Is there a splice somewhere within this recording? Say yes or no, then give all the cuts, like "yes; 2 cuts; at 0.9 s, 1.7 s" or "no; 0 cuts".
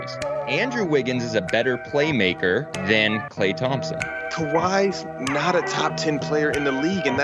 no; 0 cuts